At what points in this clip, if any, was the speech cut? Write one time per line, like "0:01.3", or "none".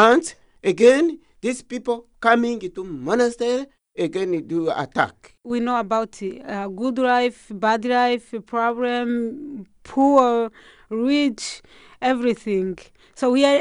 0:03.8
0:05.3